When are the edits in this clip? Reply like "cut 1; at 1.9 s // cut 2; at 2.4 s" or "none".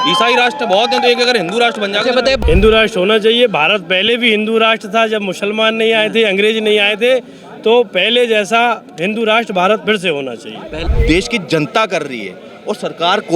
cut 1; at 2.4 s // cut 2; at 10.9 s